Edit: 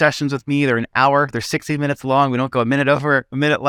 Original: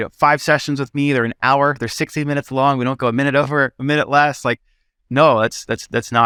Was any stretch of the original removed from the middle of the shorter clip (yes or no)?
no